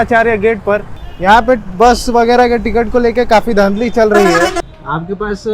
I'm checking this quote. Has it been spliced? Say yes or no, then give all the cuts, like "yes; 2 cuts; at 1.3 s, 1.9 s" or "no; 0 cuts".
yes; 2 cuts; at 0.9 s, 4.6 s